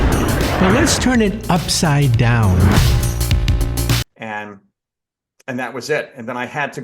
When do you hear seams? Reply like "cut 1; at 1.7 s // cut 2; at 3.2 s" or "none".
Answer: cut 1; at 4.0 s